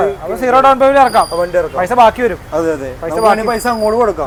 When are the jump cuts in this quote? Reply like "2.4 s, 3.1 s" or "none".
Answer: none